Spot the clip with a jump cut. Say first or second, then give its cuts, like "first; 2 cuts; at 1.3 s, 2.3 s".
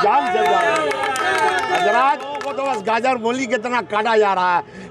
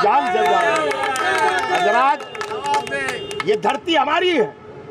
first; 1 cut; at 2.5 s